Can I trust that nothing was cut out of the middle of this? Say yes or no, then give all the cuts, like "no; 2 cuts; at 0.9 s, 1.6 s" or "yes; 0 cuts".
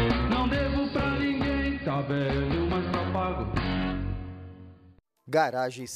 no; 1 cut; at 4.8 s